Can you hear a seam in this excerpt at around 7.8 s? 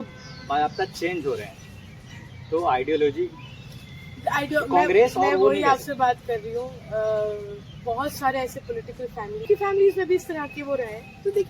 no; 1 cut; at 9.4 s

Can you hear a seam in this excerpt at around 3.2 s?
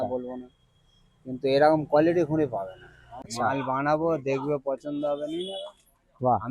yes; 1 cut; at 3.2 s

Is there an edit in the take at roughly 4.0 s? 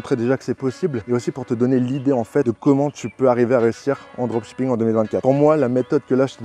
no; 3 cuts; at 1.0 s, 2.4 s, 5.2 s

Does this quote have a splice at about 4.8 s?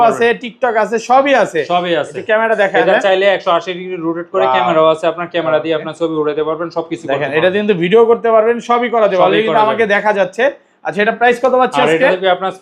no; 0 cuts

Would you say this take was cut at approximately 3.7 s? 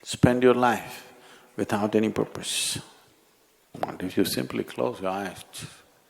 yes; 1 cut; at 3.7 s

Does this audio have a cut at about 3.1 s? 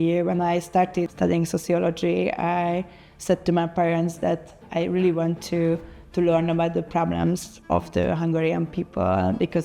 no; 2 cuts; at 1.1 s, 7.5 s

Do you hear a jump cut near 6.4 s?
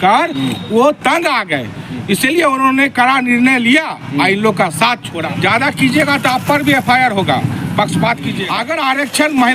no; 2 cuts; at 5.1 s, 8.5 s

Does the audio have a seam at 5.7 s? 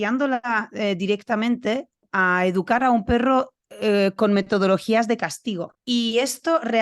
yes; 2 cuts; at 2.0 s, 5.7 s

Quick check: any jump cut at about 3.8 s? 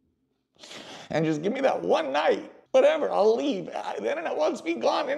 no; 1 cut; at 2.5 s

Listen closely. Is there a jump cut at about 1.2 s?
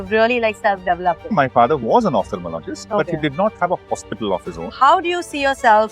yes; 2 cuts; at 1.2 s, 4.6 s

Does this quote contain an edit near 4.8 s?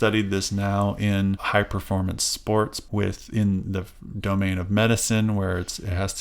no; 2 cuts; at 1.4 s, 2.8 s

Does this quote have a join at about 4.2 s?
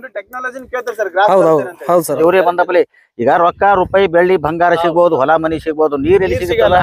no; 1 cut; at 2.1 s

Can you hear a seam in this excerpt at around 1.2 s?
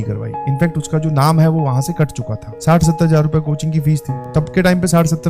no; 2 cuts; at 2.5 s, 4.2 s

